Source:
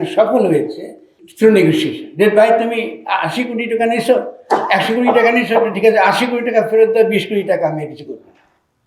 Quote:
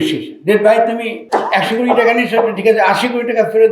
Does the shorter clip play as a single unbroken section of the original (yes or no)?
no